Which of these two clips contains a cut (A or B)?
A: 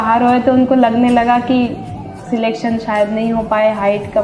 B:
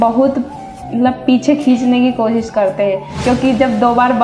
B